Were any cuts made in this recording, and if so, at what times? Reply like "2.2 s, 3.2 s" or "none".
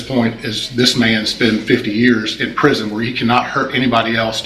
none

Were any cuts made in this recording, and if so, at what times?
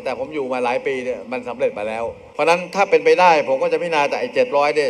2.2 s

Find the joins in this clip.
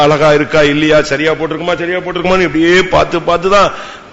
none

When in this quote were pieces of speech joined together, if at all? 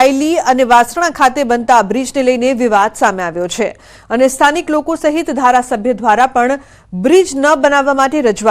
3.3 s

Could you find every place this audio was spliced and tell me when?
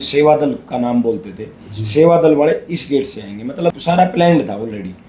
3.8 s

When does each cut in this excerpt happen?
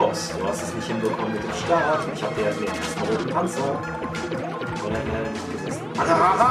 none

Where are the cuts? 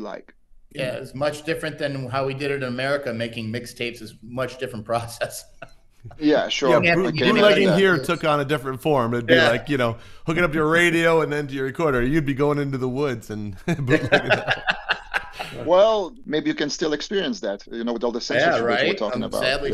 16.2 s

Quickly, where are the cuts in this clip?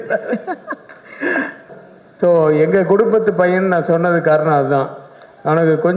1.7 s

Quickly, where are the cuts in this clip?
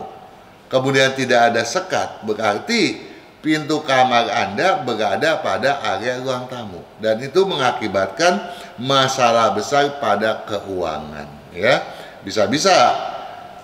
none

